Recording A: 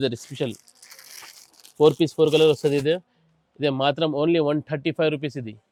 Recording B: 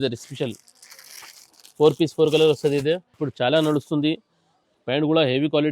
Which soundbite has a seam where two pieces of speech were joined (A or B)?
B